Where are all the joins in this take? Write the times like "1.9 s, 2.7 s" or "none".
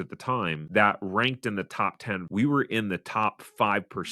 2.2 s